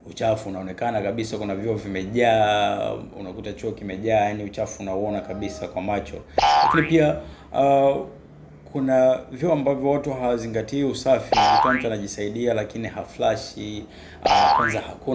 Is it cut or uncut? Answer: uncut